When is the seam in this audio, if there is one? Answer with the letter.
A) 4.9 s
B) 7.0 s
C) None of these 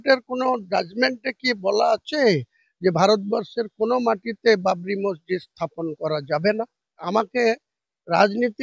B